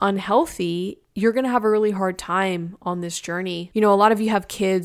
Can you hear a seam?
yes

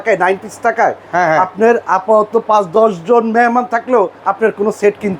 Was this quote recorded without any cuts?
no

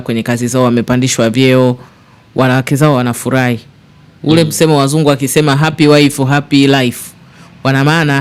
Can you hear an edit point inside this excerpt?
no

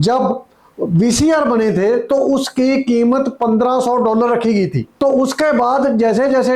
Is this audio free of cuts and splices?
no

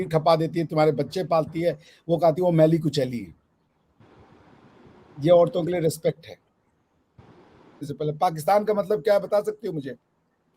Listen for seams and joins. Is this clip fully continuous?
no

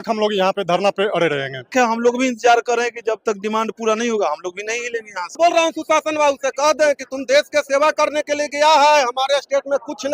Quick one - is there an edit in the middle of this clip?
yes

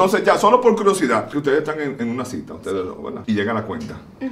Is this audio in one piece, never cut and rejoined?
no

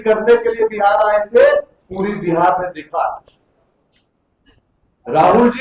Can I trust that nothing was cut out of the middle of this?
yes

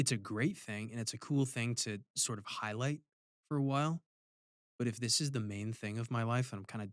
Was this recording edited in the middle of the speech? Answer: no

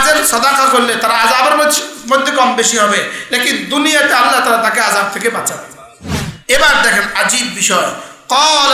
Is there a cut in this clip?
yes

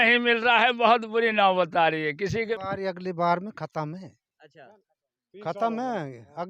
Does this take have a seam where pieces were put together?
yes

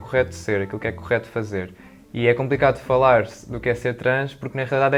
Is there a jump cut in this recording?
no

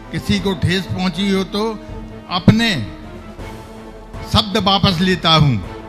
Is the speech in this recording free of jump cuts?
no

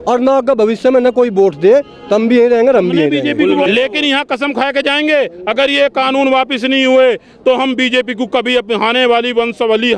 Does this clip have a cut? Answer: yes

